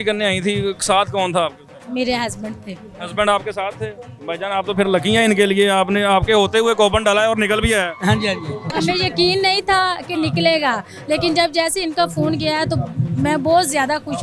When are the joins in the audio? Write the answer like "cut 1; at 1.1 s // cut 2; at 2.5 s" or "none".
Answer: cut 1; at 8.7 s